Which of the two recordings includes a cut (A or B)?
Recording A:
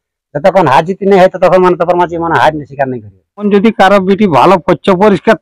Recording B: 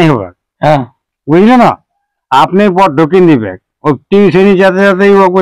A